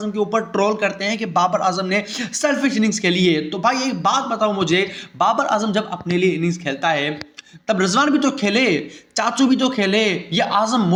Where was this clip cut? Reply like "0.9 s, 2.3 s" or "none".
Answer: none

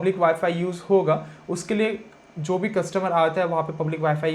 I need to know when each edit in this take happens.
none

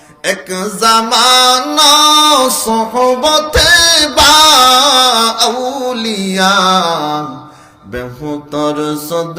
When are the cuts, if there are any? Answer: none

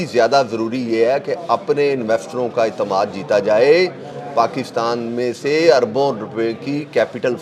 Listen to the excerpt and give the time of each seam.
none

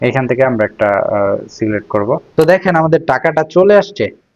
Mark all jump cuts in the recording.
2.3 s

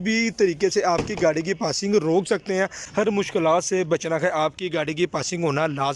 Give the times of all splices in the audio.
2.8 s

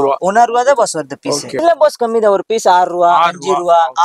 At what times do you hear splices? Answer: 1.5 s

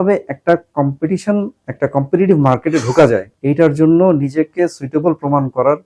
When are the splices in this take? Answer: none

